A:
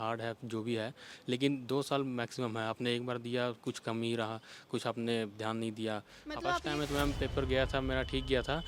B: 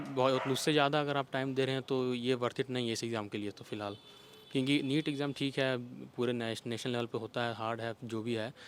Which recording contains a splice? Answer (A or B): A